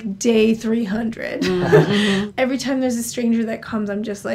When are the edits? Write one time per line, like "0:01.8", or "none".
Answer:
0:02.3